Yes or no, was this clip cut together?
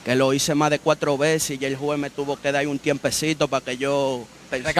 no